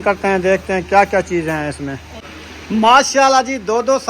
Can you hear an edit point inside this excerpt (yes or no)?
yes